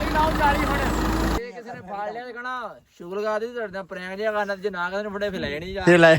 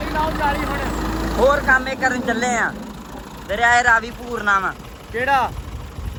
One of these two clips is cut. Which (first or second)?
first